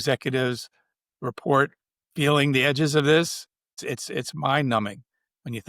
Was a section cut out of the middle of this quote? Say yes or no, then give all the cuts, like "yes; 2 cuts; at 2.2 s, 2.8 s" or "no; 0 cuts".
yes; 1 cut; at 3.8 s